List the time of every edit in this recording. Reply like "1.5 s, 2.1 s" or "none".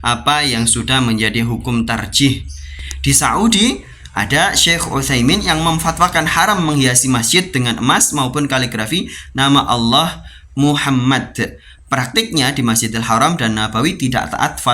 2.7 s